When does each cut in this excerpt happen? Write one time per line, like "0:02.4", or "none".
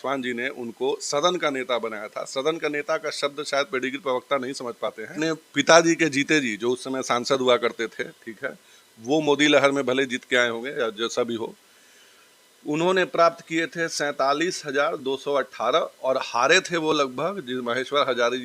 0:05.2